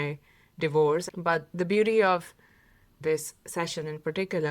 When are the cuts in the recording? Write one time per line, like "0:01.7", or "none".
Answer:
0:01.1

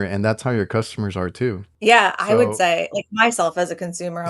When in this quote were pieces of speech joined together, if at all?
0:01.7

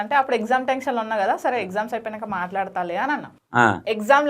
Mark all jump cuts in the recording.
none

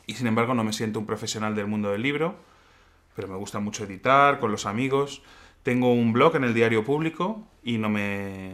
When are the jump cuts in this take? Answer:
0:06.9

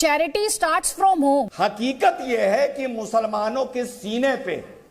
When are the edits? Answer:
0:01.5

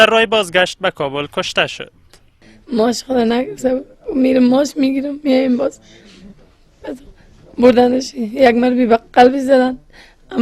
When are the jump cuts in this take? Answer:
0:08.7

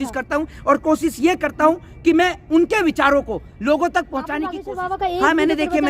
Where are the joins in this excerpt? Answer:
0:04.6

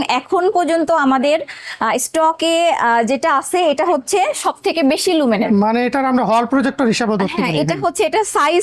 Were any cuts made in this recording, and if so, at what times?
none

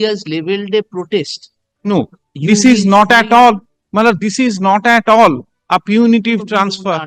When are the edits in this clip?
none

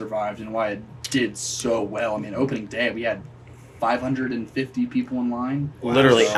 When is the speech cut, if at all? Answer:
none

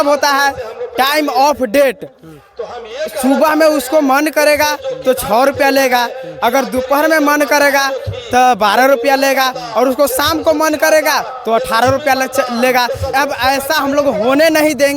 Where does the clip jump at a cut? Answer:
0:13.1

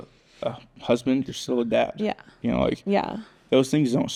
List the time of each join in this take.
none

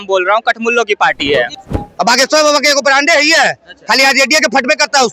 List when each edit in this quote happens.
0:01.5

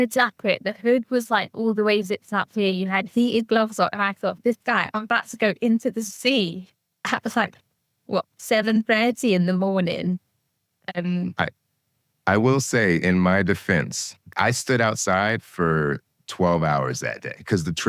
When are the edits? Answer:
0:14.3

